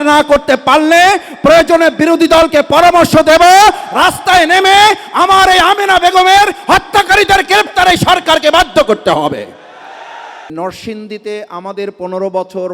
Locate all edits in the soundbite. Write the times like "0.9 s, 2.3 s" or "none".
10.5 s